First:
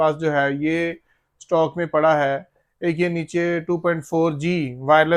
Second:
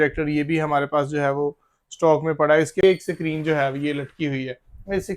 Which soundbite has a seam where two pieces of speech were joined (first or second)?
second